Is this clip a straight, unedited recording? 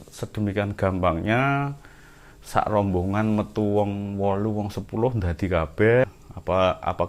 no; 1 cut; at 6.0 s

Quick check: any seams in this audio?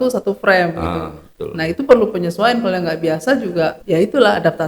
yes; 1 cut; at 3.8 s

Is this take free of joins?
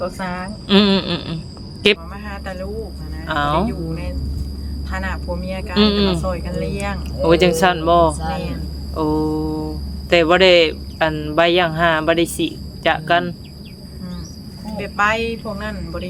no; 1 cut; at 2.0 s

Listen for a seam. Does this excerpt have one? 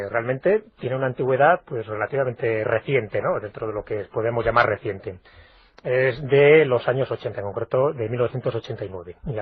yes; 1 cut; at 3.7 s

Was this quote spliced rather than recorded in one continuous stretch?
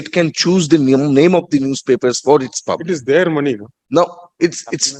no; 0 cuts

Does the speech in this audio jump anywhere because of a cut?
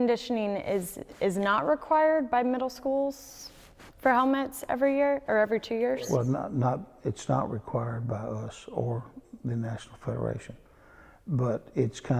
no; 0 cuts

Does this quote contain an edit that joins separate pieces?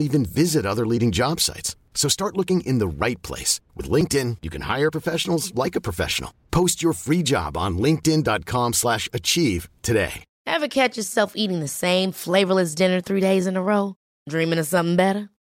yes; 1 cut; at 10.3 s

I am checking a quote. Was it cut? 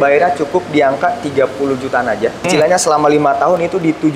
yes; 1 cut; at 2.4 s

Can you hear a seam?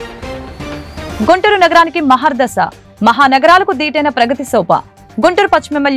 yes; 1 cut; at 1.1 s

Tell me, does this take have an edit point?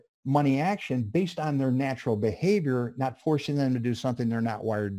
no; 0 cuts

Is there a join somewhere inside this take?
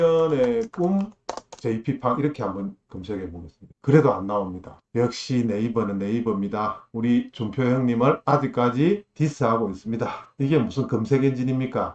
no; 0 cuts

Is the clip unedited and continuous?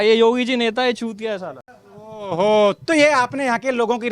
yes; 0 cuts

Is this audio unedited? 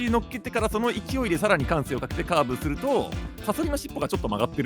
no; 1 cut; at 3.4 s

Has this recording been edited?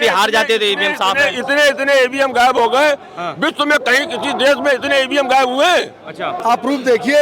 yes; 1 cut; at 6.3 s

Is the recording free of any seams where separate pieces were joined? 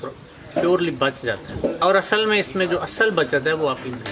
no; 1 cut; at 1.8 s

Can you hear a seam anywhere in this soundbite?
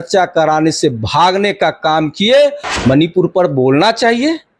yes; 1 cut; at 2.7 s

